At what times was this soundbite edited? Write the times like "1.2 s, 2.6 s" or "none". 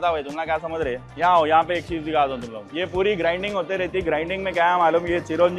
none